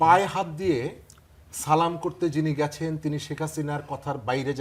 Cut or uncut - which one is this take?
uncut